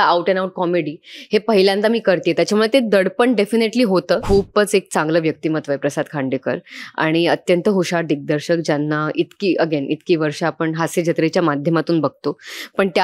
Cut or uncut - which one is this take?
cut